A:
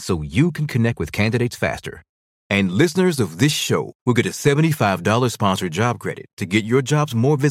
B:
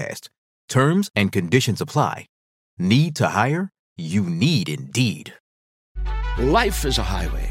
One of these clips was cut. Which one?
B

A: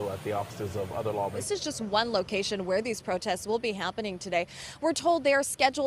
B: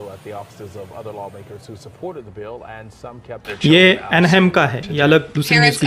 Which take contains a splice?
A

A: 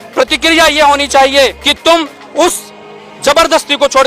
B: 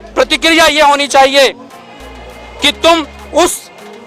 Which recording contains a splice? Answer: A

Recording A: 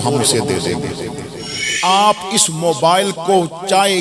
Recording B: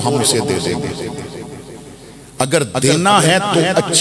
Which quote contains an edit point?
A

